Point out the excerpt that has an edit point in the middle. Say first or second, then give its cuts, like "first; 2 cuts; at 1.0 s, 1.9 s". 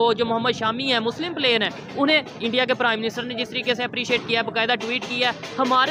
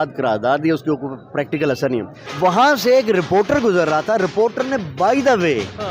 second; 1 cut; at 2.1 s